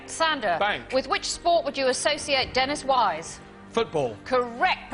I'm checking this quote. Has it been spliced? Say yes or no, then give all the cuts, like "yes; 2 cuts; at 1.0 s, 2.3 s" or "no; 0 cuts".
yes; 1 cut; at 2.8 s